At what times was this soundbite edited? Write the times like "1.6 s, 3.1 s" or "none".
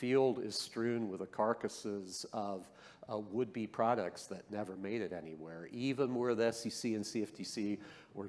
none